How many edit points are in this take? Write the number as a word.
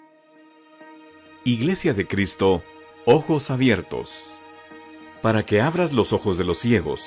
zero